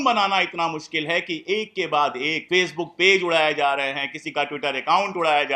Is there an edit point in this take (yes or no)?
yes